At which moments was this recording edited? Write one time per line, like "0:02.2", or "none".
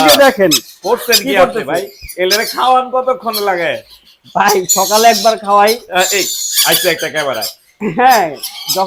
none